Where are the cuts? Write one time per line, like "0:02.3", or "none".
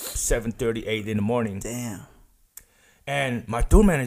none